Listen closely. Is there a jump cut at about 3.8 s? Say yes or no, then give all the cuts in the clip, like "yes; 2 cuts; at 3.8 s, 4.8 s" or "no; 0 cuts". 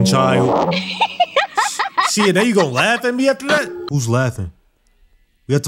yes; 1 cut; at 3.8 s